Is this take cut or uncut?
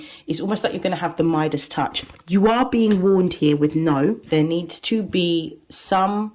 cut